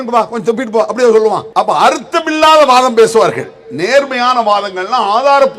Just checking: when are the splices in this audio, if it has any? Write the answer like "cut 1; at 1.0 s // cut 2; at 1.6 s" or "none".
cut 1; at 1.4 s